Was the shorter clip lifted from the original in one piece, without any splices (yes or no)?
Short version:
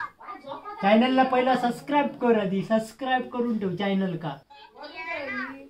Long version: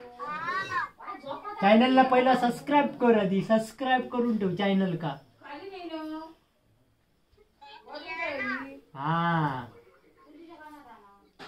no